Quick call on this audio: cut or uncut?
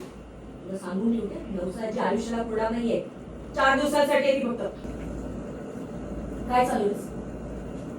cut